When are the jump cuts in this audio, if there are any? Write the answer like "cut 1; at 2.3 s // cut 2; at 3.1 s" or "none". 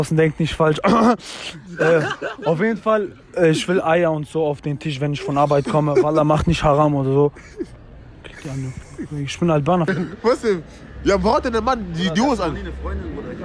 cut 1; at 9.9 s